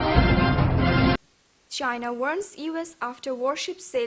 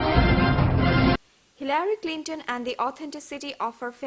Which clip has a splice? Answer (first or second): first